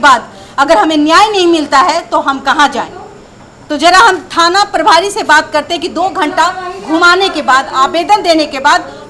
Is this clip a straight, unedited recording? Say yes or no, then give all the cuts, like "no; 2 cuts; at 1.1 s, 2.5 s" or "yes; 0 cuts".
yes; 0 cuts